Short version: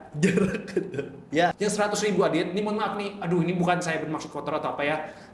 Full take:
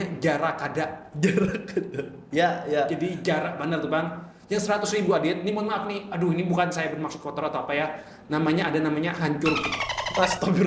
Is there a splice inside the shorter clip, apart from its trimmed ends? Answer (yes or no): yes